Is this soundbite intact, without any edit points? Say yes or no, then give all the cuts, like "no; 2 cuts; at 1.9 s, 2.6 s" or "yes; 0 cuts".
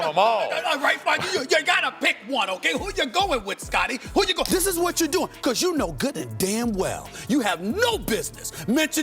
no; 1 cut; at 4.5 s